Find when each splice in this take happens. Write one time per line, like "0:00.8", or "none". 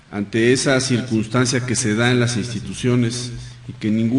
0:02.1